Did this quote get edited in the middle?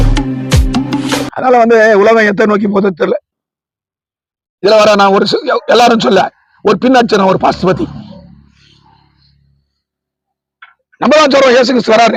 no; 0 cuts

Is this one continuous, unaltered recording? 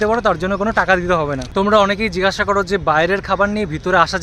no; 1 cut; at 1.4 s

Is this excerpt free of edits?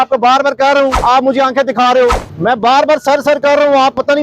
no; 2 cuts; at 1.0 s, 2.3 s

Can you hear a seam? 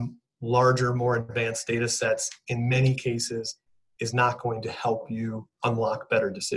no; 0 cuts

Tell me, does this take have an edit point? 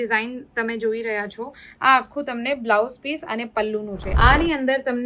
yes; 1 cut; at 4.0 s

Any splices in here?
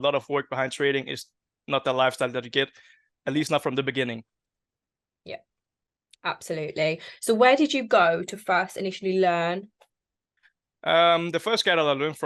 no; 0 cuts

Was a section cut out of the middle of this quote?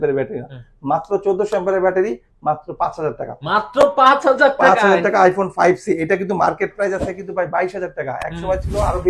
no; 0 cuts

